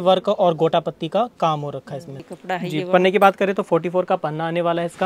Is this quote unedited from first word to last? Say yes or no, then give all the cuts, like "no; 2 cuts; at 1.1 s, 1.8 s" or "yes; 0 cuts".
no; 1 cut; at 2.2 s